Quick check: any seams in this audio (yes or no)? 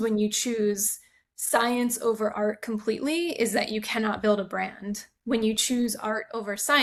no